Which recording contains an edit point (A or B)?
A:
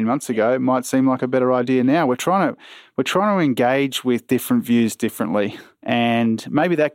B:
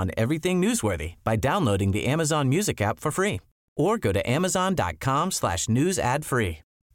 A